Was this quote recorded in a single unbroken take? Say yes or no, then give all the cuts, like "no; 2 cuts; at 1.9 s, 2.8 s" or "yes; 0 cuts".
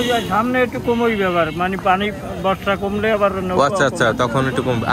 yes; 0 cuts